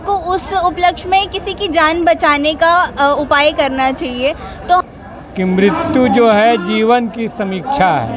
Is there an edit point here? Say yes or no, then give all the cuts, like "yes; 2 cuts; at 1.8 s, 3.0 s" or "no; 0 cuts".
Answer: yes; 1 cut; at 4.8 s